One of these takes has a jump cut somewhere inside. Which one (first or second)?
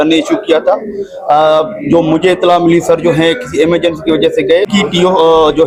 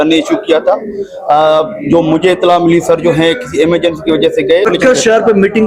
second